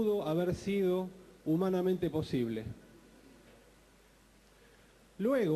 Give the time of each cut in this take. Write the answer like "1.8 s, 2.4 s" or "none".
2.0 s